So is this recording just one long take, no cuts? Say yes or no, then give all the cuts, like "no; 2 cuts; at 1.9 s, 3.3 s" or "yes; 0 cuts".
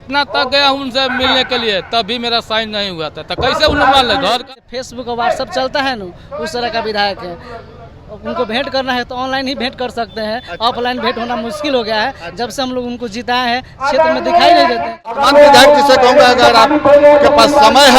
no; 2 cuts; at 4.4 s, 15.2 s